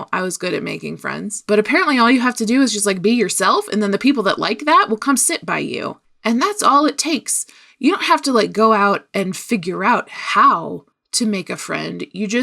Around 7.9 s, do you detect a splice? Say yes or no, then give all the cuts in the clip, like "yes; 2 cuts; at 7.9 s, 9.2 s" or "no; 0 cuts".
no; 1 cut; at 1.4 s